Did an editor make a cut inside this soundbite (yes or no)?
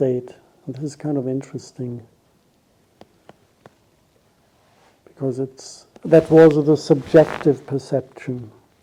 no